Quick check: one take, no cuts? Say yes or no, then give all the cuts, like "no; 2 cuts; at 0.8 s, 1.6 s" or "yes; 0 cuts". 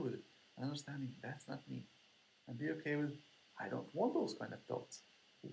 yes; 0 cuts